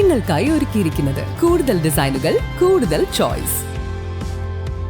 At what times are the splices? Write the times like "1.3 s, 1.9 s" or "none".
1.2 s